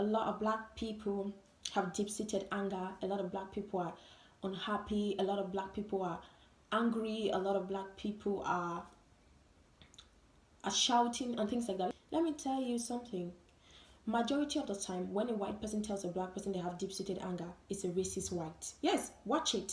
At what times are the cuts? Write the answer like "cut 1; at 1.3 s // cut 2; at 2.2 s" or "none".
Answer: cut 1; at 11.9 s